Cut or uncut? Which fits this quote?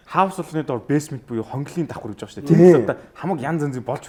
uncut